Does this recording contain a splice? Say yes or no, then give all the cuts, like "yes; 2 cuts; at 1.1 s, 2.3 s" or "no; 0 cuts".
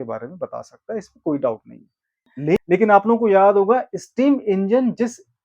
yes; 1 cut; at 2.6 s